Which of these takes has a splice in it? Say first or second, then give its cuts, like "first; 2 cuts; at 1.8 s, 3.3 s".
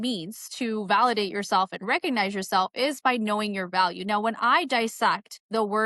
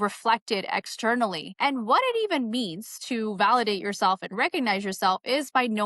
second; 1 cut; at 1.5 s